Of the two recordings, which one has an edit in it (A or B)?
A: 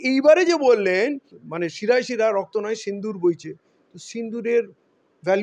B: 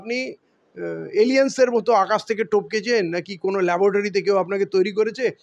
A